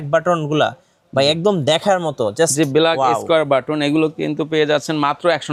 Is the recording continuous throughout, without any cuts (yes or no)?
yes